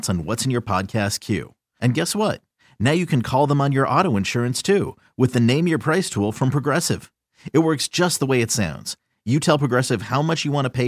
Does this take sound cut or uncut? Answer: uncut